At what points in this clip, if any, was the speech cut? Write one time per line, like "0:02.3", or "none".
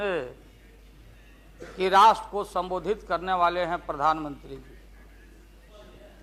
none